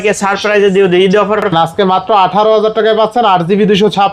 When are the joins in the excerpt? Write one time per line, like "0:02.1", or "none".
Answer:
0:01.5